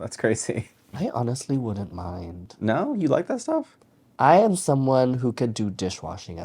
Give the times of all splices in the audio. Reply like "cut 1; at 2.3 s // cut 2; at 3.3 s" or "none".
cut 1; at 1.0 s